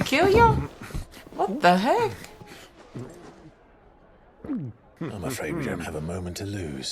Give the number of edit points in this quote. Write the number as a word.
one